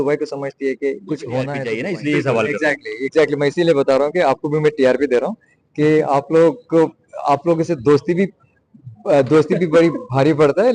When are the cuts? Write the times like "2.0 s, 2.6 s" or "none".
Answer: 1.7 s